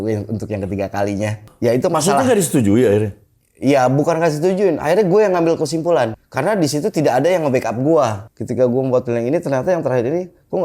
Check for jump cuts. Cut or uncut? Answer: cut